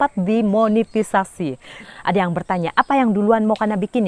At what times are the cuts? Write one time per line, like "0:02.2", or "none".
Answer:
0:01.8